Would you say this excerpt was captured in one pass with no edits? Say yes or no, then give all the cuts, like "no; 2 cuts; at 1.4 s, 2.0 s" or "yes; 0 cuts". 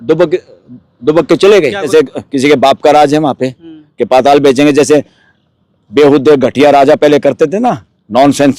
no; 1 cut; at 1.9 s